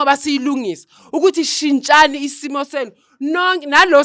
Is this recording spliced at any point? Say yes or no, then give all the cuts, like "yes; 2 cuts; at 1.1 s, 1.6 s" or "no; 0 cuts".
no; 0 cuts